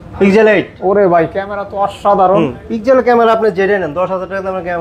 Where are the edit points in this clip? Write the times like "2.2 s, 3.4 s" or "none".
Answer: none